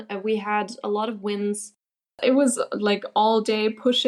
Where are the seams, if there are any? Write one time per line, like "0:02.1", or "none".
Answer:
0:02.1